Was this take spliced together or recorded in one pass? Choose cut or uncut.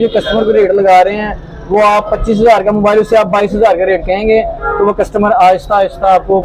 uncut